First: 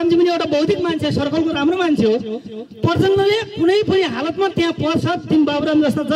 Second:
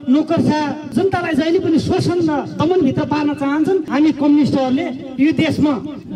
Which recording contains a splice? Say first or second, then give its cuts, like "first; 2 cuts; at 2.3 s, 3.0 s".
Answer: second; 2 cuts; at 0.9 s, 3.9 s